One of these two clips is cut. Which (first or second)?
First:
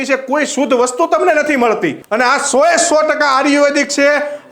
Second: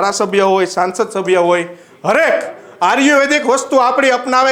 first